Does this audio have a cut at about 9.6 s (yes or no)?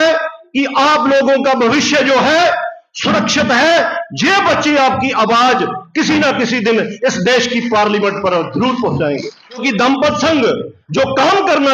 yes